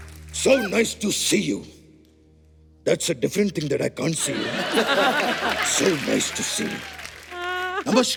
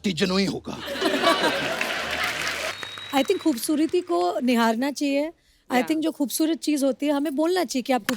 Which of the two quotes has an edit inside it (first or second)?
second